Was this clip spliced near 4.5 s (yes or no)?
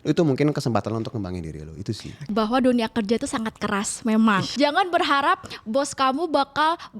yes